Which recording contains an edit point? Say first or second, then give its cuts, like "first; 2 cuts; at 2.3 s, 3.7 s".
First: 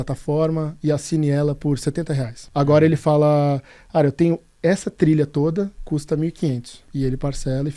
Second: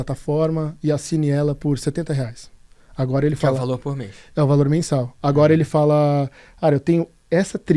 first; 2 cuts; at 2.4 s, 6.8 s